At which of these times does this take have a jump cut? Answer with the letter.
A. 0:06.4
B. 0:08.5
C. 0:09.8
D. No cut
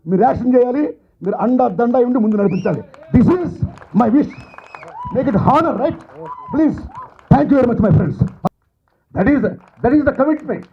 B